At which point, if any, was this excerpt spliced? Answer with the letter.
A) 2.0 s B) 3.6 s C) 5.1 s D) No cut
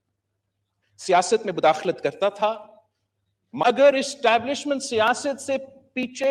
B